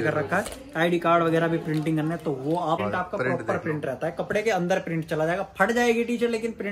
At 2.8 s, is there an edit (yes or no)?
yes